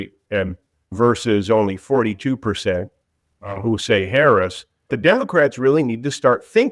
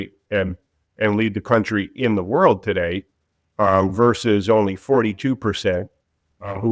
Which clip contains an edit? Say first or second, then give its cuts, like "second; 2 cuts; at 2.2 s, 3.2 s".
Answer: first; 2 cuts; at 0.9 s, 4.9 s